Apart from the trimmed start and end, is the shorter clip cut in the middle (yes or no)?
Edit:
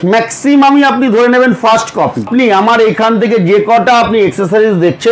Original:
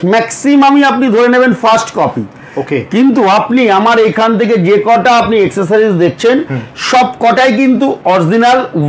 yes